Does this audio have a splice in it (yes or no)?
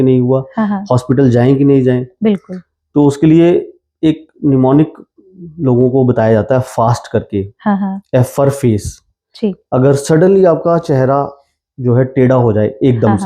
no